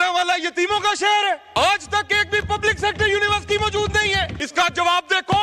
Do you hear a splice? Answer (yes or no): yes